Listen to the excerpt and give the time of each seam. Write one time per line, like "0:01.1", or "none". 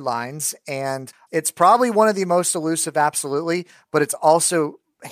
0:01.1